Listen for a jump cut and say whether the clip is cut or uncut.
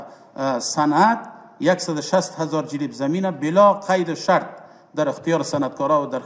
uncut